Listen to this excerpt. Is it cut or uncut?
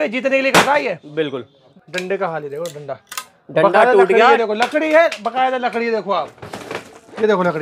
cut